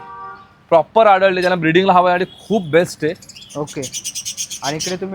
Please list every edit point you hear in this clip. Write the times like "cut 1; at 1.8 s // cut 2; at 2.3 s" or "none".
none